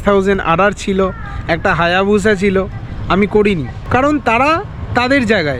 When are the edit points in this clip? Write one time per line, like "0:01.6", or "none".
none